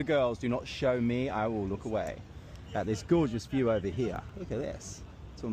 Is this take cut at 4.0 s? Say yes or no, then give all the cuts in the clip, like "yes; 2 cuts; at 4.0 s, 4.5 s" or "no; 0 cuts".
no; 1 cut; at 1.8 s